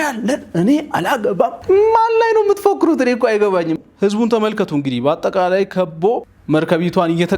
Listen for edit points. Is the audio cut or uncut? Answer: cut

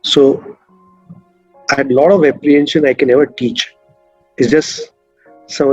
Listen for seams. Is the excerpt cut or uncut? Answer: uncut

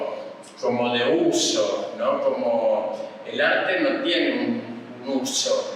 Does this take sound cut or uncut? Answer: uncut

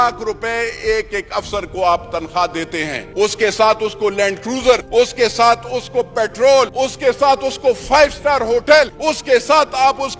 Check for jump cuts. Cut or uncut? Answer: cut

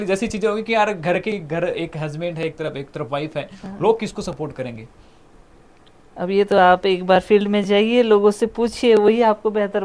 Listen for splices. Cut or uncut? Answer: uncut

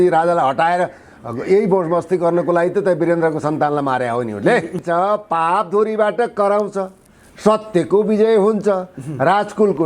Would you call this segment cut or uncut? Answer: cut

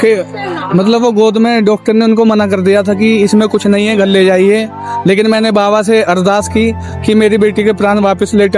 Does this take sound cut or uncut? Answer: uncut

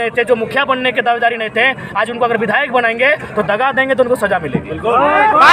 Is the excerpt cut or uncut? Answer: uncut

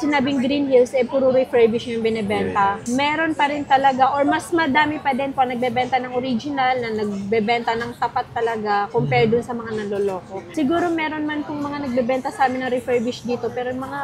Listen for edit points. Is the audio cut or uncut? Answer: uncut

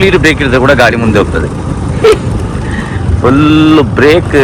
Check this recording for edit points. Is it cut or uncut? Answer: uncut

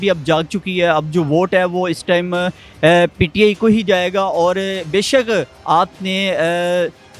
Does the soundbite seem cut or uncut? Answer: uncut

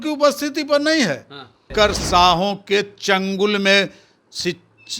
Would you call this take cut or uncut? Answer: cut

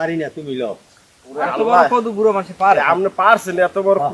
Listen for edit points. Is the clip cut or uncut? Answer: uncut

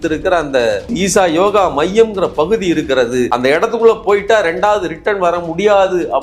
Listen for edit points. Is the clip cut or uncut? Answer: cut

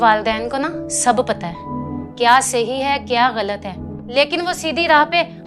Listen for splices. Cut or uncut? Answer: uncut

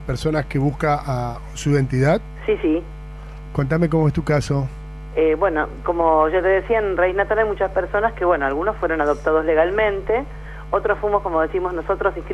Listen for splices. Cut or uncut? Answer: cut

